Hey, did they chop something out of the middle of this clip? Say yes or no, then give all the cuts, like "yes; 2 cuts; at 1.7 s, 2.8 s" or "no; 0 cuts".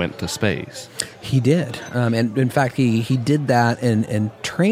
no; 0 cuts